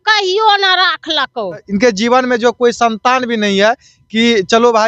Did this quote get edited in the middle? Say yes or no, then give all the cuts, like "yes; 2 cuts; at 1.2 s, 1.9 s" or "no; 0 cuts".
yes; 1 cut; at 1.7 s